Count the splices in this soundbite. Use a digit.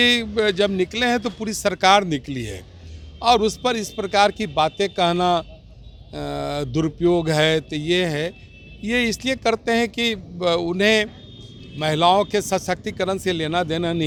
0